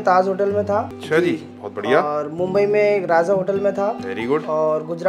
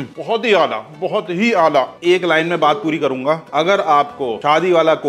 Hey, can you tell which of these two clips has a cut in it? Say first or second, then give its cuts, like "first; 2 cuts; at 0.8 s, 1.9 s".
first; 1 cut; at 1.0 s